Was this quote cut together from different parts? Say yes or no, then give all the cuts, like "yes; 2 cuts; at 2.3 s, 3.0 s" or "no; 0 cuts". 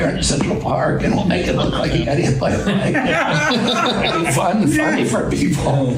no; 0 cuts